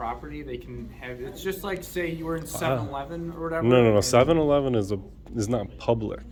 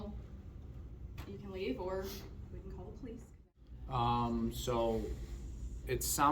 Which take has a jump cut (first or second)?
second